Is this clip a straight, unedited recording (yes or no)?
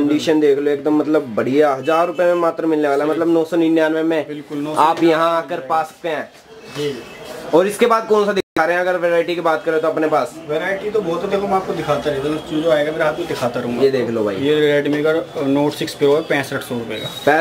yes